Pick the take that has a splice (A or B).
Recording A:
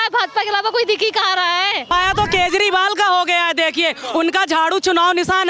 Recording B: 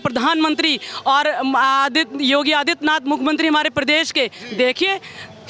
A